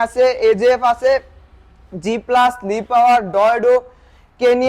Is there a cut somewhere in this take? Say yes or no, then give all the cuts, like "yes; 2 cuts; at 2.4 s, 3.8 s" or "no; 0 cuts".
no; 0 cuts